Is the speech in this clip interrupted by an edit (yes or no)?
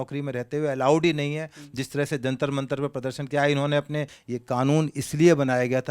yes